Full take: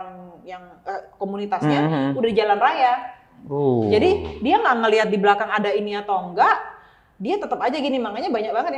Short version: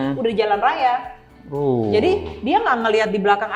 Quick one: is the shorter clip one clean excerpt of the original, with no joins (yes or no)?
yes